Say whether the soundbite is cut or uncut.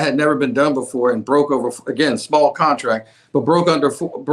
uncut